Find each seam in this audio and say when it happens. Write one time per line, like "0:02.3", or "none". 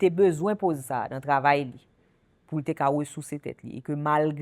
none